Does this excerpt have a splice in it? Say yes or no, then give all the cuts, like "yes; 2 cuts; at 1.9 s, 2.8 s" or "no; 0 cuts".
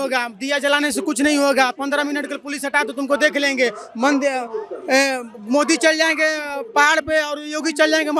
no; 0 cuts